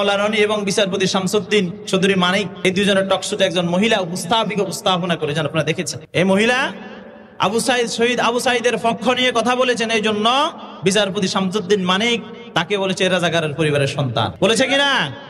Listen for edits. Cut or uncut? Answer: cut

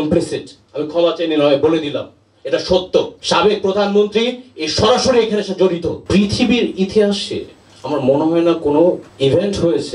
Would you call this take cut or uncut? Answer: cut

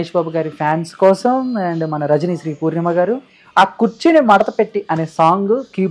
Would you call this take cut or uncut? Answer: uncut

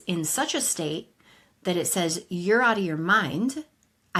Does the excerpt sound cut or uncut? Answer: uncut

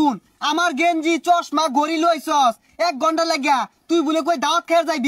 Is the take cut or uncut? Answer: uncut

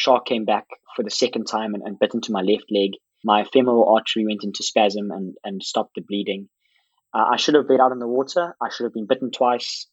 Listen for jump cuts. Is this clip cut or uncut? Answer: uncut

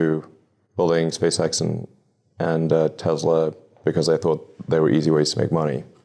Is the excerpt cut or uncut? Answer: uncut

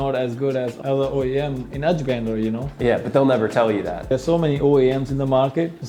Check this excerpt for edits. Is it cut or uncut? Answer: cut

